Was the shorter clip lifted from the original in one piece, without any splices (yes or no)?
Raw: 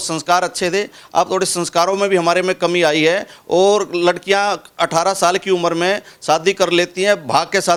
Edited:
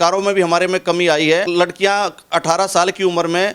no